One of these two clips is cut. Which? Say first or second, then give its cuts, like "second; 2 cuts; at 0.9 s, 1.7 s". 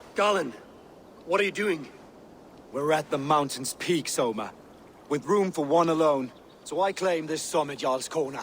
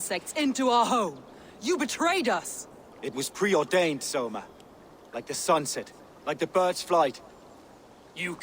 first; 2 cuts; at 1.1 s, 2.1 s